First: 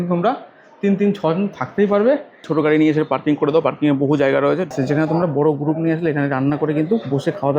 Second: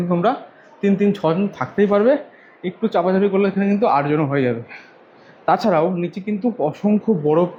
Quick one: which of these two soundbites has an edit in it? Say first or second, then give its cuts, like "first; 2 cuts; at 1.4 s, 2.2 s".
first; 2 cuts; at 2.5 s, 4.7 s